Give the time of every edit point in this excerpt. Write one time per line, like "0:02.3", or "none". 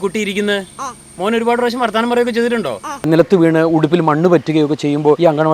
0:03.0